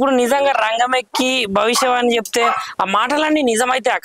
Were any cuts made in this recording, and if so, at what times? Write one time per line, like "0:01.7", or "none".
none

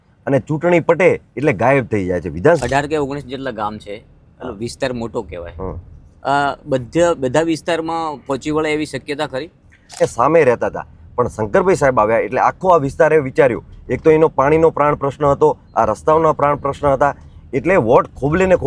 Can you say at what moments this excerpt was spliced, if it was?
0:02.6
0:10.0

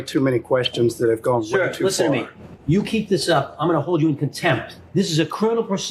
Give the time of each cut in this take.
none

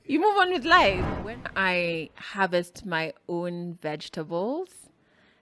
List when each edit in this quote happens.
0:01.4

